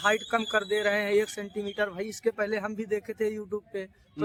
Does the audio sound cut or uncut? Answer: uncut